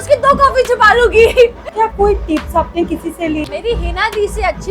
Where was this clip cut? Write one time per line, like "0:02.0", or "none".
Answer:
0:01.6
0:03.4